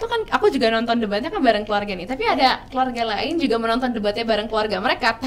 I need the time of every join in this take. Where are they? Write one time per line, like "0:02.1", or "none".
none